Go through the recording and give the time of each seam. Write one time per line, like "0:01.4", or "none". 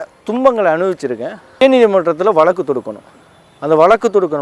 0:01.6